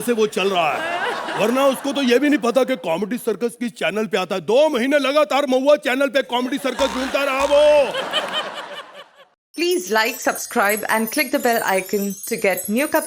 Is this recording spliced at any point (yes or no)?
yes